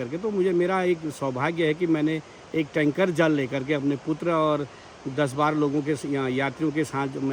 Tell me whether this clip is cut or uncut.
uncut